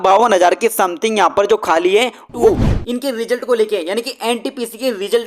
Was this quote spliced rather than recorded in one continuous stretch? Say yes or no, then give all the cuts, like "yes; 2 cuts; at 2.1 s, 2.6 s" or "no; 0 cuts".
yes; 1 cut; at 2.5 s